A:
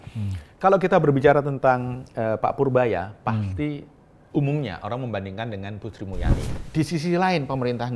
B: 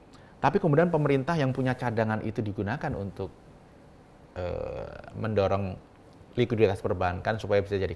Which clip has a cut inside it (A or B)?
A